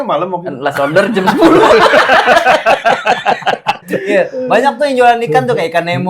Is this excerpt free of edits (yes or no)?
no